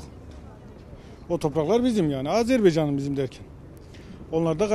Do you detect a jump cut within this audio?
no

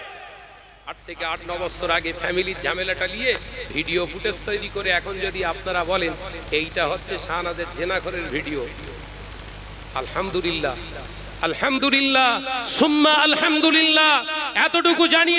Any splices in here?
yes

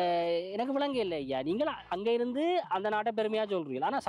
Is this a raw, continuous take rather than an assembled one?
yes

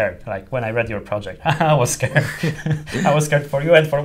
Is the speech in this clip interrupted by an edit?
no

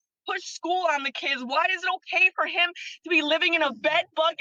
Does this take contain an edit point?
no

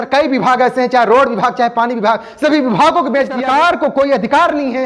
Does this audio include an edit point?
yes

